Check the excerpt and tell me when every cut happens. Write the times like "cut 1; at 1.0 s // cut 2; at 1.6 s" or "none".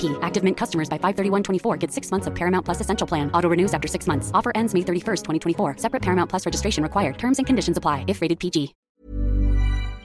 cut 1; at 8.8 s